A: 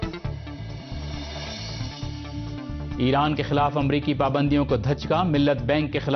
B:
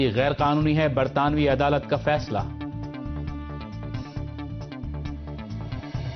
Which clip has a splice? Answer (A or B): A